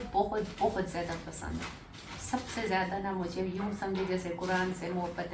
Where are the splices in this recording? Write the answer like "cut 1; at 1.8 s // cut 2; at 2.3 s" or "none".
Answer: none

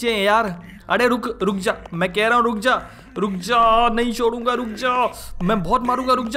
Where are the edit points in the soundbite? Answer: none

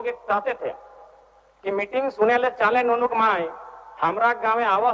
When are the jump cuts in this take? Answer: none

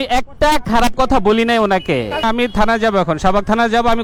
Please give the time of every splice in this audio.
none

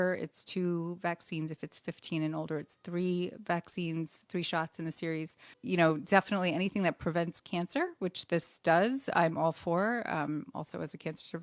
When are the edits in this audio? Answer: cut 1; at 5.6 s

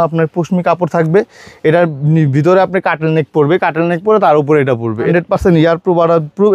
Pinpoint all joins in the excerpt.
cut 1; at 5.1 s

